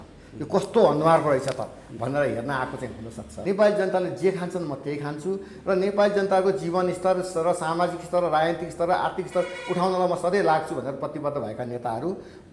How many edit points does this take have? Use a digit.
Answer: 1